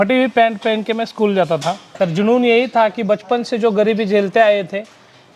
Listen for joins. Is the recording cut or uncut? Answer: cut